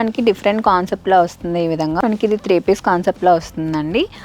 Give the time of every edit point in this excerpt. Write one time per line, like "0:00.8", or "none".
0:02.0

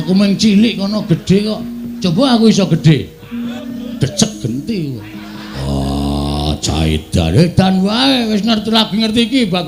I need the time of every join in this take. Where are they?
0:03.6
0:05.6

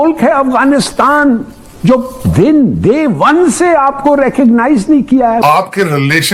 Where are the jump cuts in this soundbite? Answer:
0:05.4

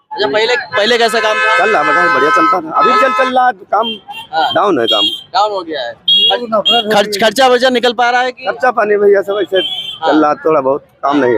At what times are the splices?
none

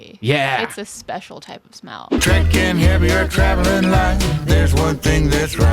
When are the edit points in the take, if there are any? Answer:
0:02.2

